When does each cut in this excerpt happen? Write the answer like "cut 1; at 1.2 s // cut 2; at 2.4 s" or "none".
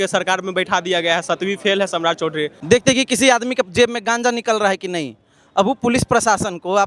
cut 1; at 2.5 s